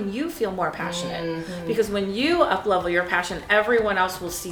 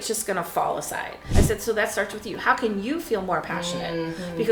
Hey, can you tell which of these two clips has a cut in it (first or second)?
second